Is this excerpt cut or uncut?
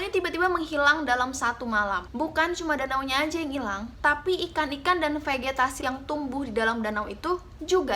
cut